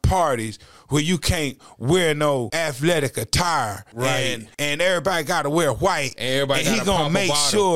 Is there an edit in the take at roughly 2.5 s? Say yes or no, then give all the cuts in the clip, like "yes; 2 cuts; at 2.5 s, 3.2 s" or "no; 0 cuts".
yes; 2 cuts; at 2.5 s, 4.1 s